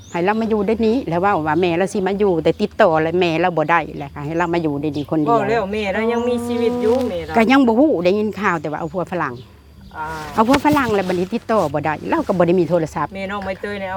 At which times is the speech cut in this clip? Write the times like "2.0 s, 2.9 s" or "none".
none